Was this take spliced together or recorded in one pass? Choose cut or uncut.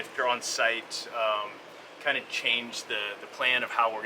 uncut